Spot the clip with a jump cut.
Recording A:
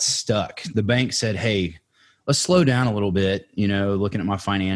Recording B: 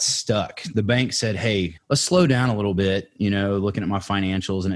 B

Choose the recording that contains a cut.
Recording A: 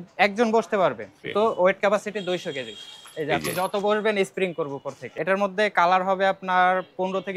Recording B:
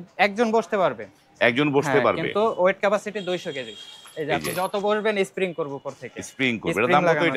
A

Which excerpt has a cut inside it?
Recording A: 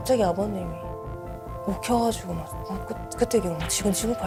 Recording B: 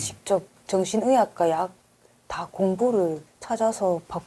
B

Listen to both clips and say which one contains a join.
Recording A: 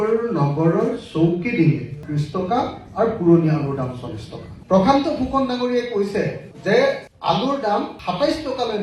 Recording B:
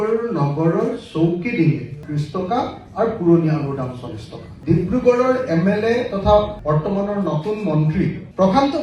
A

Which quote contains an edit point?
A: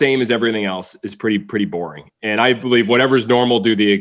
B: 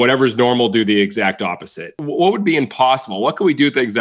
B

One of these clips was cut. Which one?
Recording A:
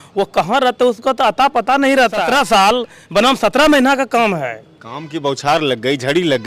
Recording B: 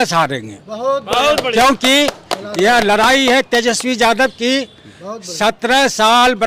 A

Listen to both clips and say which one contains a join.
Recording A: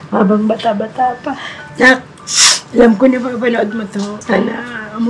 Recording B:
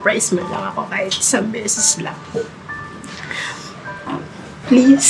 A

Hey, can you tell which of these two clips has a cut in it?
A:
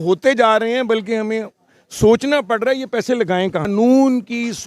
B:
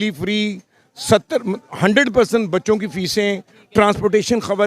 A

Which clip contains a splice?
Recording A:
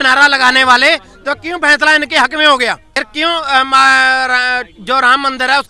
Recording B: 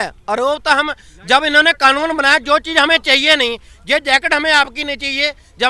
A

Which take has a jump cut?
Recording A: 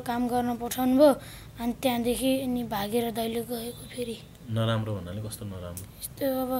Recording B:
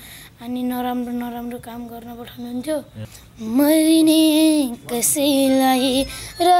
B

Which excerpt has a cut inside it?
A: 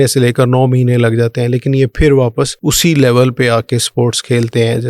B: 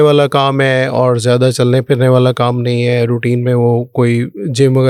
A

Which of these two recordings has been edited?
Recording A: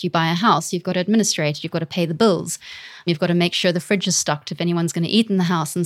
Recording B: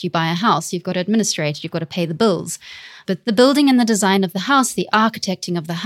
B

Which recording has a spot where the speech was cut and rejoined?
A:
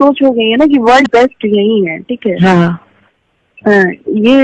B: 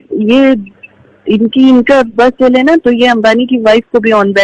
A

